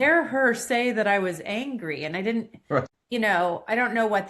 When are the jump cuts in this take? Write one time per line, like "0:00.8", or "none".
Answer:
0:02.9